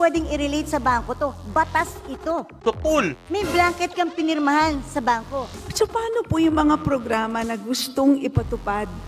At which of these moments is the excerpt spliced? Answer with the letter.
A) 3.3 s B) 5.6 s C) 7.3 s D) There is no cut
B